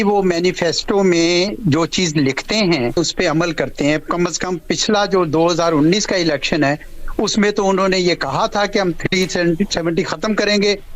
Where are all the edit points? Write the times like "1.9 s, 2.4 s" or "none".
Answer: 3.0 s